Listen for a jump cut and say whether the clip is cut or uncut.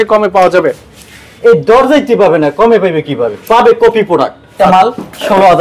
cut